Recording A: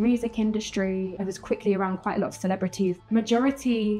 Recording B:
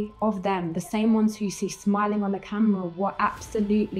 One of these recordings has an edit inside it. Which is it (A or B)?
A